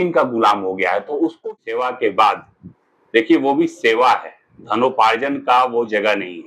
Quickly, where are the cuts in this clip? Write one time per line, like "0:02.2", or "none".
0:01.4